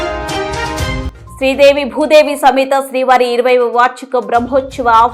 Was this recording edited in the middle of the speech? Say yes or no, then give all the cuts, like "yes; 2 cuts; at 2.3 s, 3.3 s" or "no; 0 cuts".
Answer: yes; 1 cut; at 1.2 s